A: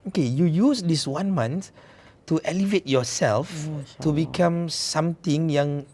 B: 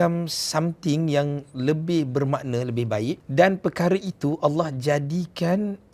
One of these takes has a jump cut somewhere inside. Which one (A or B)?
B